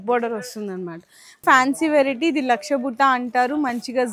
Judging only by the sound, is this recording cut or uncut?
cut